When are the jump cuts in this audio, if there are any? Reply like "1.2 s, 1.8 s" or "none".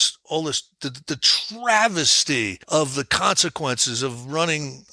2.6 s